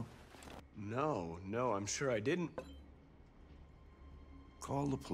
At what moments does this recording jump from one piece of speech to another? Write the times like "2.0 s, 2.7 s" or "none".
0.9 s